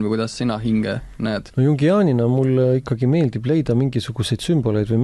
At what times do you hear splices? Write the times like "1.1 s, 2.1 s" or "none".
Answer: 1.5 s